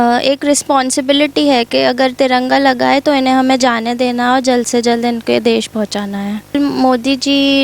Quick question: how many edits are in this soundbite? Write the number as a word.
one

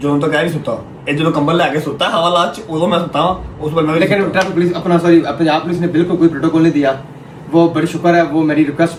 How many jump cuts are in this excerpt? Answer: zero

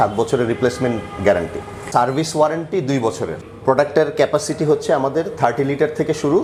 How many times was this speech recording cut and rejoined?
zero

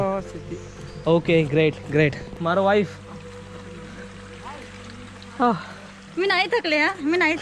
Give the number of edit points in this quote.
one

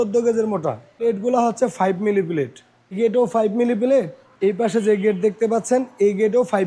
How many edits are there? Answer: three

